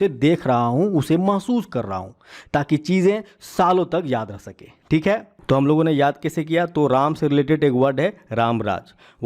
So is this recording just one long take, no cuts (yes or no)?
no